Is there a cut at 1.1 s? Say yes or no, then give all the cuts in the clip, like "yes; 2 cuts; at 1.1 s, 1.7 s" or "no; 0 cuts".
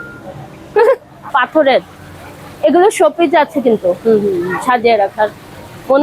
yes; 1 cut; at 1.1 s